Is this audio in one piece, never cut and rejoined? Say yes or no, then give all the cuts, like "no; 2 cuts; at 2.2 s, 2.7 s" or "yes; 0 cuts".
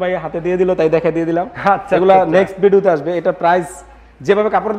yes; 0 cuts